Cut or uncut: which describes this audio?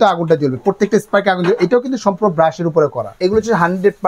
cut